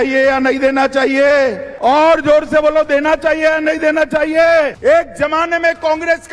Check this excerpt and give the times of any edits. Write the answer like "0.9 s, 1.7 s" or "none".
1.7 s, 4.8 s